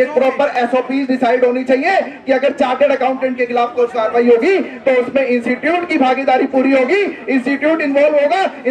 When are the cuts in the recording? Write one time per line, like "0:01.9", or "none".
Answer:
none

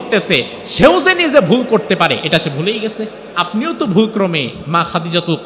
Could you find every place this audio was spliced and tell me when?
0:03.2
0:04.6

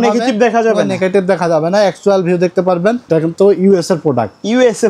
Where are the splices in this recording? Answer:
0:03.1

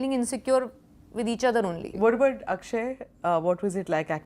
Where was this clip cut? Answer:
0:01.9

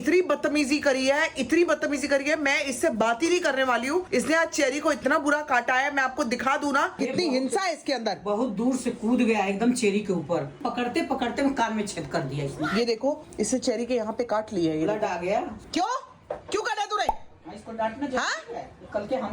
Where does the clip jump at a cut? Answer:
0:07.0
0:10.6
0:15.6

